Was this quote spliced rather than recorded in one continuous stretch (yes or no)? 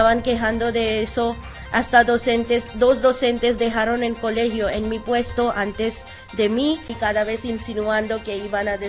yes